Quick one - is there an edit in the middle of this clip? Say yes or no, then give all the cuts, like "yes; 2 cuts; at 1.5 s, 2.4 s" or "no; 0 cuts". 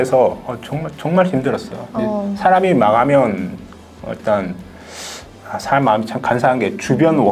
no; 0 cuts